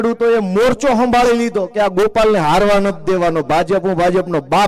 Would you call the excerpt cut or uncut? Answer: uncut